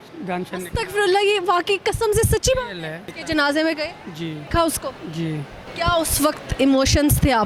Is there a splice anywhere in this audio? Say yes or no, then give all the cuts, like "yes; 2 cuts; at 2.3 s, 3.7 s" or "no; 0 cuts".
yes; 3 cuts; at 3.1 s, 4.4 s, 5.6 s